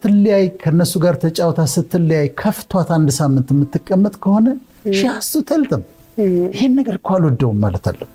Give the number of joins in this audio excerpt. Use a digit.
0